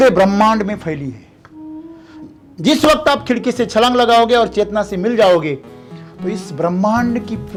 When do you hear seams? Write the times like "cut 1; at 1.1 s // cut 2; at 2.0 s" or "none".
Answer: none